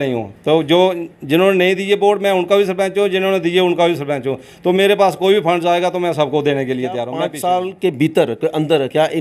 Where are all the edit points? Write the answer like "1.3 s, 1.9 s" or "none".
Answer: 7.2 s